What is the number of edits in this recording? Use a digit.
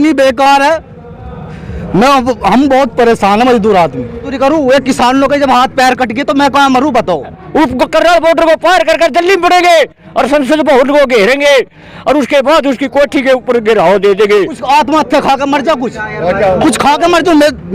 3